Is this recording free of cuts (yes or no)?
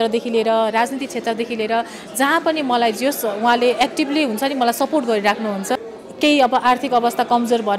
no